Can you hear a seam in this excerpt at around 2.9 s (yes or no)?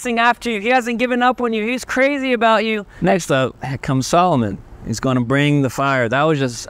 yes